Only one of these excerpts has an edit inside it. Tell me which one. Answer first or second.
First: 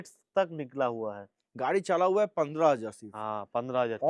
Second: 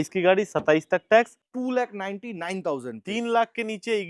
second